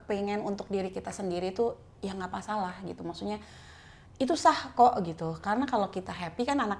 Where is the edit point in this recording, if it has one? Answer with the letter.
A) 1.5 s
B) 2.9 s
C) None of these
C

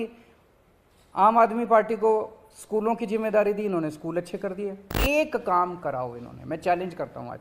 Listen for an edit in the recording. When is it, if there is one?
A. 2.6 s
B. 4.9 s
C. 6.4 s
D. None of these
B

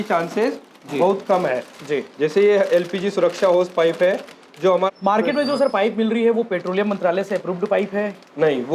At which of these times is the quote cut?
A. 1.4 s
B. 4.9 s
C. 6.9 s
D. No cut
B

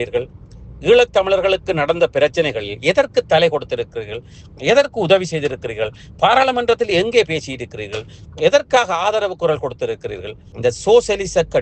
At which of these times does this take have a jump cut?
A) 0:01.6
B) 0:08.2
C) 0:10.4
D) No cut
C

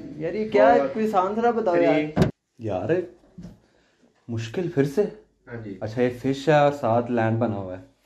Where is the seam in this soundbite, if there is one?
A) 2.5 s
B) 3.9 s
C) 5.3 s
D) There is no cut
A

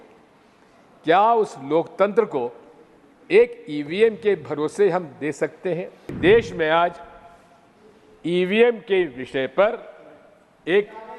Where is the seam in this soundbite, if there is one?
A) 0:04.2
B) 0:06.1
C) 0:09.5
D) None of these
B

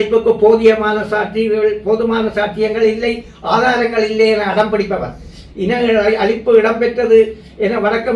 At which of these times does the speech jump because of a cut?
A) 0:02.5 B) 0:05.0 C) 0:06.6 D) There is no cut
D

